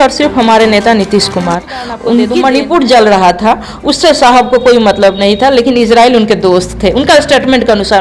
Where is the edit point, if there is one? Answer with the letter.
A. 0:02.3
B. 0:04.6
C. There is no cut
A